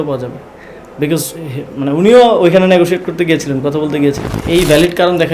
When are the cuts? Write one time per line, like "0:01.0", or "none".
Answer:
0:04.3